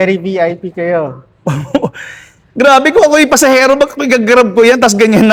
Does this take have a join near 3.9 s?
no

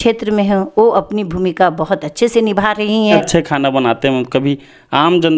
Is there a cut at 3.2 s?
yes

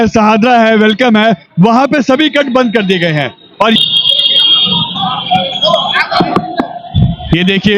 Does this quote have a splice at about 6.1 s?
no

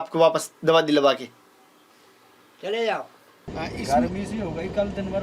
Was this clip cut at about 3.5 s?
yes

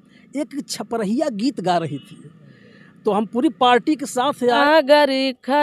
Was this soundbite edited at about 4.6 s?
yes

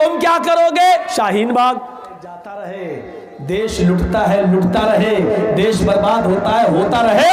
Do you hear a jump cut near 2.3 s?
yes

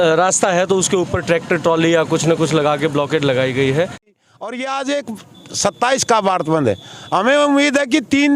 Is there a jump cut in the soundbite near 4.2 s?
yes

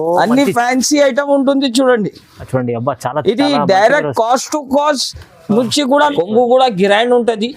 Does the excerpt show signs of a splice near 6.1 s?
yes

